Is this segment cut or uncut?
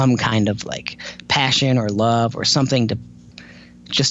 uncut